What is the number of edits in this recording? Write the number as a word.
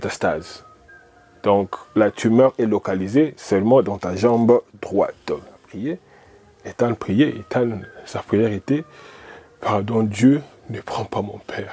one